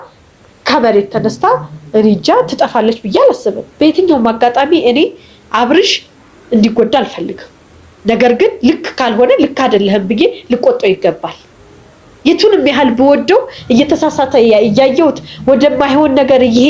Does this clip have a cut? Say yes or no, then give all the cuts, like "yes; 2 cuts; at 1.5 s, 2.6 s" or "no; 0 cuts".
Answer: yes; 1 cut; at 3.6 s